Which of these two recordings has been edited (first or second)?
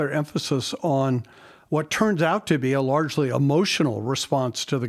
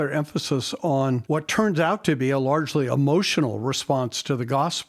second